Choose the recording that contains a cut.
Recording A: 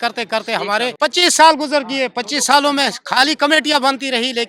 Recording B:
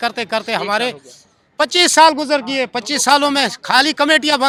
A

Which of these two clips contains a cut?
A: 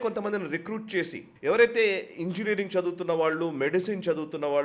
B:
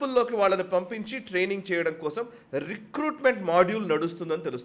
A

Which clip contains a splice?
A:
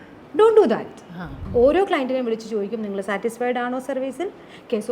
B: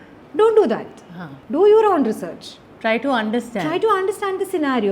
A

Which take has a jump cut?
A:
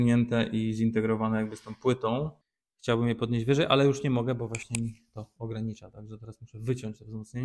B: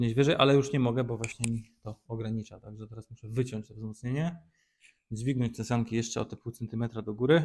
A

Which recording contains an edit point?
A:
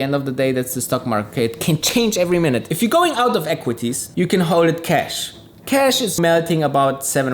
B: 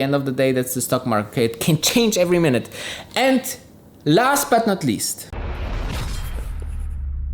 A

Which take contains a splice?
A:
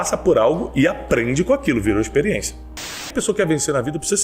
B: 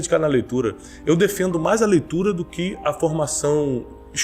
A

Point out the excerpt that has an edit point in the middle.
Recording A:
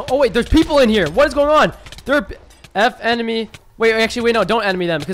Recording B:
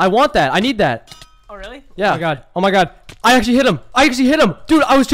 B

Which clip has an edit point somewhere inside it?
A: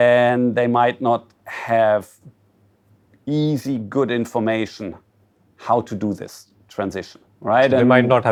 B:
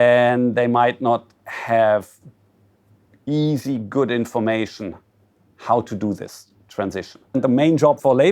B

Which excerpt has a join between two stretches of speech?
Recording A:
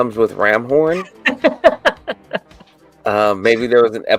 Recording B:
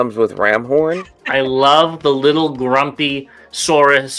B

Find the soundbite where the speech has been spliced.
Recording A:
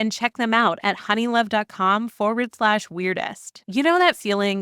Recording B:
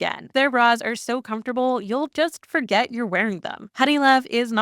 B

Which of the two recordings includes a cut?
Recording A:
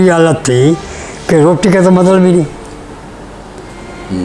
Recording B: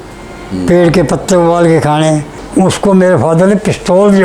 B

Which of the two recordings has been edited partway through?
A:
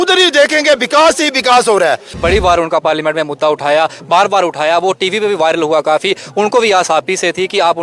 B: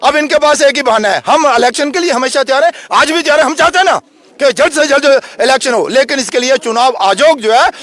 A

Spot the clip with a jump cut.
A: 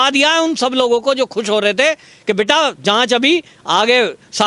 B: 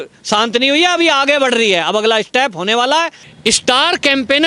B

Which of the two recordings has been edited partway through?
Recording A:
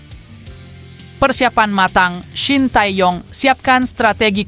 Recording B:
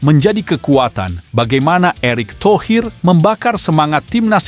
A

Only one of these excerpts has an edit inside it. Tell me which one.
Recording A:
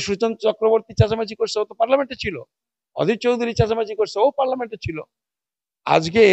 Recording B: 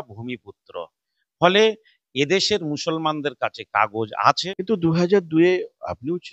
B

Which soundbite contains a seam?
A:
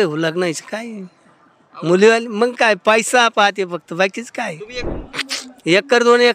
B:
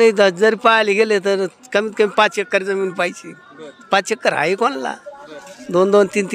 A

